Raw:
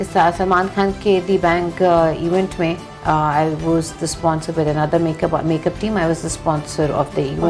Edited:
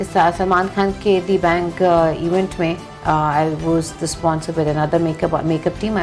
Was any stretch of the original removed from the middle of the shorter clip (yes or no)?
no